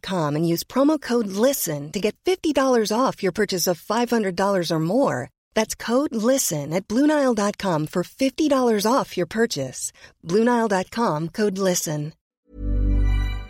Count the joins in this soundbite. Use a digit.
1